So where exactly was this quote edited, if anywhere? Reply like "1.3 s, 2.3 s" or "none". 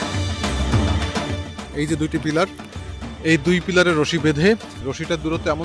1.6 s, 4.7 s